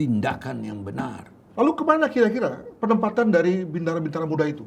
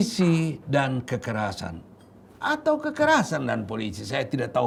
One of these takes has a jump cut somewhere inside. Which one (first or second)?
first